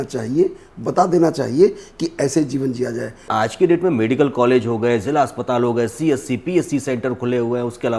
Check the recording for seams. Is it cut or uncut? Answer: cut